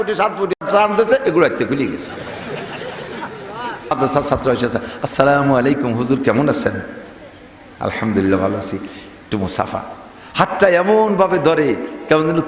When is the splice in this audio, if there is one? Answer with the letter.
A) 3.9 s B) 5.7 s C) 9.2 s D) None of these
A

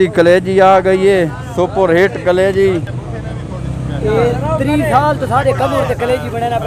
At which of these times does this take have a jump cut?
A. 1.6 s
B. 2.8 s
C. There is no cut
C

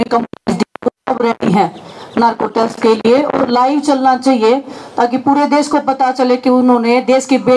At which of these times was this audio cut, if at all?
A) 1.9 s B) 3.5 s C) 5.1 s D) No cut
D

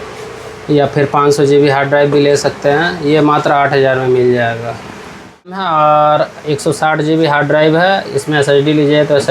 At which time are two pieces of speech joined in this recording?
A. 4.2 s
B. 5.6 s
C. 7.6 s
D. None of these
B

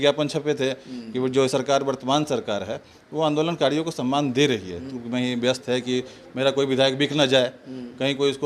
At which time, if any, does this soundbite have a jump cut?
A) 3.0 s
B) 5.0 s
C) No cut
B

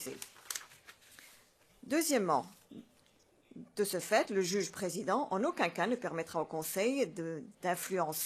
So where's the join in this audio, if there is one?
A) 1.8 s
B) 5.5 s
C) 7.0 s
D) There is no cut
D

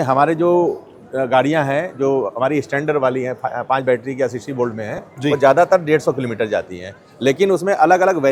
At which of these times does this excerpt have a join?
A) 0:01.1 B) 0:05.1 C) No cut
C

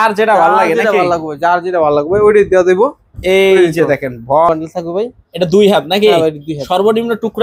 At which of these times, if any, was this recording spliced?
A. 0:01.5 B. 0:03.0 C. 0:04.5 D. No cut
C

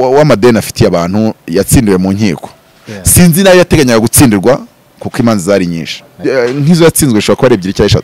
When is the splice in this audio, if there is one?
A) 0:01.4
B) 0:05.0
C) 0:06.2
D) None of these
C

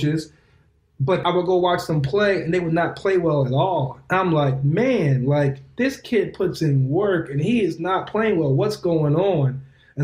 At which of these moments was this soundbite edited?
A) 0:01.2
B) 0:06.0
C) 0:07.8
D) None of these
A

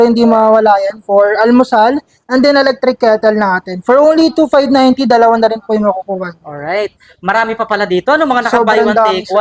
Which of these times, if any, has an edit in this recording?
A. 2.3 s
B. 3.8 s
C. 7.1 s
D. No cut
D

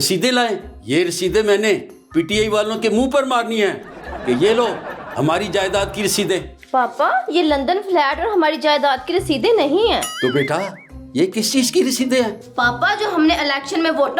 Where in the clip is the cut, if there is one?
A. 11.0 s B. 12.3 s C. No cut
B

